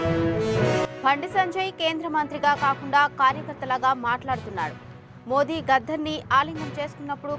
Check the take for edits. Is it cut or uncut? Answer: uncut